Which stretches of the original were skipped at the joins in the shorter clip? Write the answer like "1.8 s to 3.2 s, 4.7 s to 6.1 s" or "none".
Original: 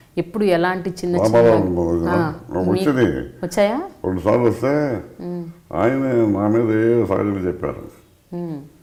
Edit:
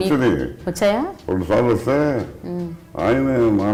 none